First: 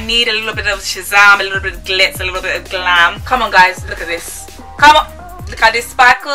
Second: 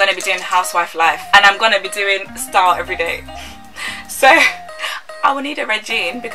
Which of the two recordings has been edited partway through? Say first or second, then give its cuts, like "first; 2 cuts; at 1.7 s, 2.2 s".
first; 1 cut; at 3.2 s